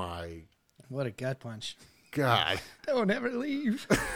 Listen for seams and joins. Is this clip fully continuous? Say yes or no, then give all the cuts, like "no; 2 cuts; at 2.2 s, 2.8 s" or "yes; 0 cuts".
no; 1 cut; at 2.7 s